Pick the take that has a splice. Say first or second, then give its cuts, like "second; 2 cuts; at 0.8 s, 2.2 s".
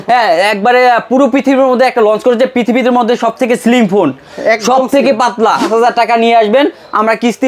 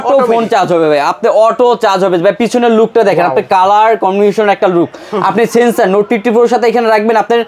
first; 1 cut; at 5.6 s